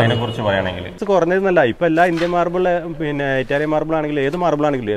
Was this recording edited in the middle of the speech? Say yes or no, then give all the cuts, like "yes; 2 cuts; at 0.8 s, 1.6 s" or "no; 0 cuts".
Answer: yes; 1 cut; at 0.9 s